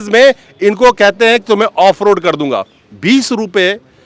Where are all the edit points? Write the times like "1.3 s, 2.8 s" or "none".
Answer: none